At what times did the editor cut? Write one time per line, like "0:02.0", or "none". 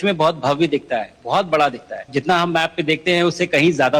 0:02.0